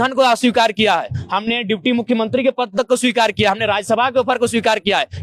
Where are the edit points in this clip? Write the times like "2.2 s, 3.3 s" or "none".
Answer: none

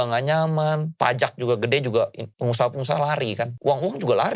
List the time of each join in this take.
0.9 s, 2.3 s, 3.5 s

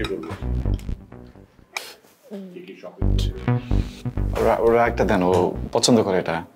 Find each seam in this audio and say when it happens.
none

